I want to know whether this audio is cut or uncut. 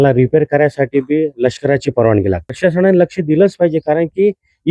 cut